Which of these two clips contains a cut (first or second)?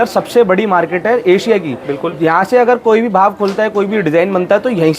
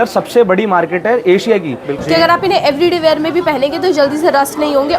second